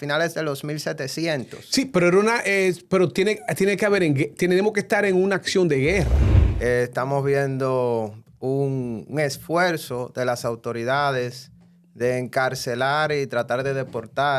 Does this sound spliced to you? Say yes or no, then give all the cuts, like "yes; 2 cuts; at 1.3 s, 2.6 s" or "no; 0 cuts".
yes; 1 cut; at 6.2 s